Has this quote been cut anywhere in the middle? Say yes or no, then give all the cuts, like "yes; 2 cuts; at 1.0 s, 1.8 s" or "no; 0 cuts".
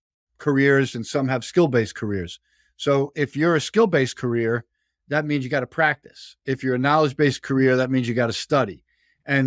no; 0 cuts